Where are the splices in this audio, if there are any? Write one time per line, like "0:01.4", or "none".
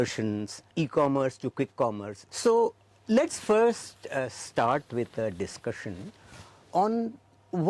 none